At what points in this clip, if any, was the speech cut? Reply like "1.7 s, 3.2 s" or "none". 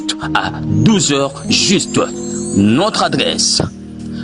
none

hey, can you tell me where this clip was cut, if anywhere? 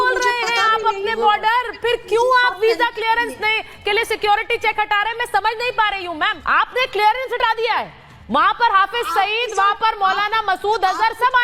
6.4 s

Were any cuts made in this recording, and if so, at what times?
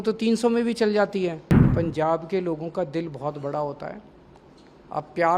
1.5 s

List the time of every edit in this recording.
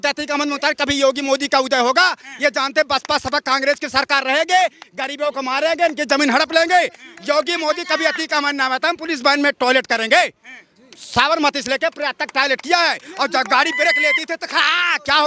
none

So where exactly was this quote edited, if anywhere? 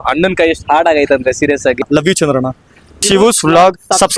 1.8 s, 3.0 s

